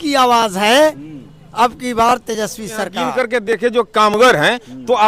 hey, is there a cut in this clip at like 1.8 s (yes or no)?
no